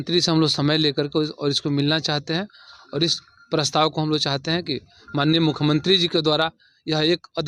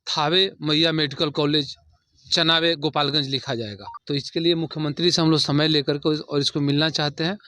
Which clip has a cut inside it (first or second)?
second